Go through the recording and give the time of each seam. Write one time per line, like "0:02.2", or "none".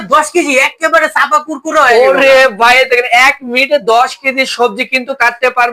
none